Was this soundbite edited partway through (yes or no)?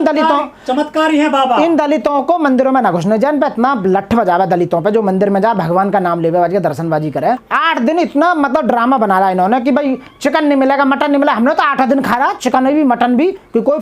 no